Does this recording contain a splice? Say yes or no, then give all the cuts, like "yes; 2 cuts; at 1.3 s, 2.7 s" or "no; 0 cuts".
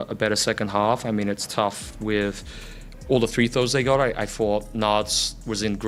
no; 0 cuts